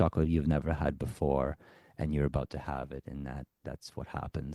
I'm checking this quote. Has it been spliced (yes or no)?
no